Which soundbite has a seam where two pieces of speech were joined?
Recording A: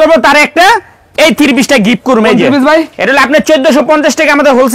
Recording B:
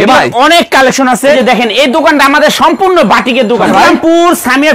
B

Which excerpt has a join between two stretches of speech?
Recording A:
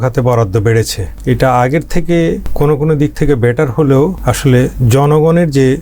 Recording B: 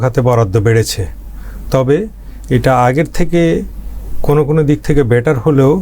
A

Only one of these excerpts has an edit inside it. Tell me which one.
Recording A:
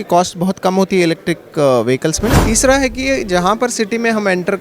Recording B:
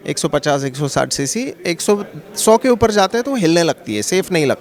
A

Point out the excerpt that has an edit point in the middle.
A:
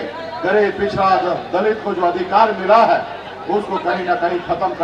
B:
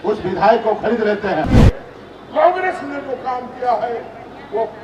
B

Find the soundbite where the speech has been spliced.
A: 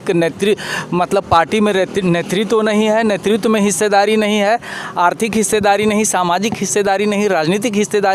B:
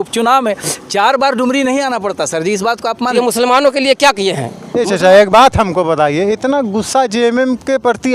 B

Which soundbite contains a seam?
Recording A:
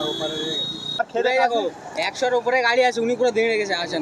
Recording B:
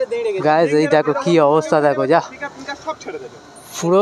A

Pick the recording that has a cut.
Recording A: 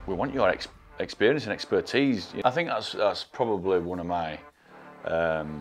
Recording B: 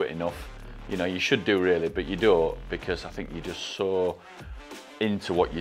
A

